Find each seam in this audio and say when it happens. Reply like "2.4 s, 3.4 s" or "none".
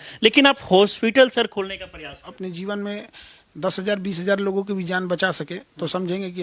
2.3 s